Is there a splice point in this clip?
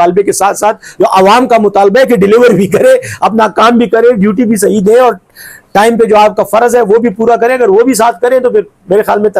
no; 0 cuts

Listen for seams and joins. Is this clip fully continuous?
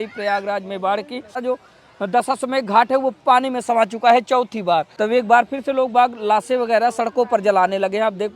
no; 2 cuts; at 1.4 s, 4.9 s

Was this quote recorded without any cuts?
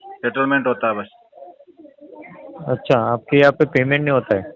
yes; 0 cuts

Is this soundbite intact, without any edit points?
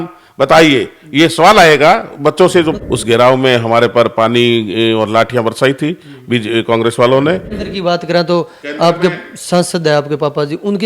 no; 2 cuts; at 2.7 s, 7.6 s

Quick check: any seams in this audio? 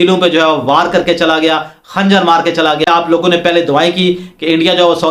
no; 0 cuts

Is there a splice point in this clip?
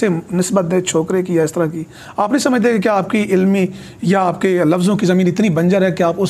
no; 0 cuts

